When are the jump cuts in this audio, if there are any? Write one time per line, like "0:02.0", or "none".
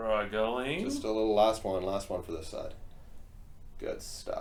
none